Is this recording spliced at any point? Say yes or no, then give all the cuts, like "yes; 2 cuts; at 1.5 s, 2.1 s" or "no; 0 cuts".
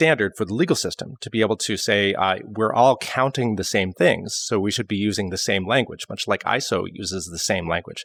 no; 0 cuts